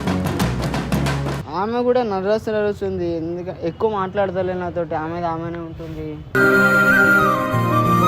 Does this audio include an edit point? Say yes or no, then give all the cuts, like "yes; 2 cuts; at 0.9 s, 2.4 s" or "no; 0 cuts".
yes; 1 cut; at 1.4 s